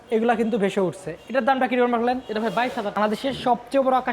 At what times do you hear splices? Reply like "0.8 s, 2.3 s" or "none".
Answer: 3.0 s